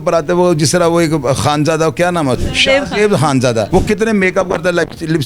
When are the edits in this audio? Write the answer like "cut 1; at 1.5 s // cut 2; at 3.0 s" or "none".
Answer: cut 1; at 2.4 s // cut 2; at 3.7 s